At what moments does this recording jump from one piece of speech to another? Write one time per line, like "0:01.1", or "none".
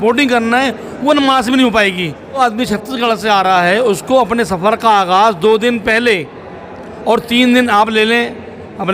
0:02.4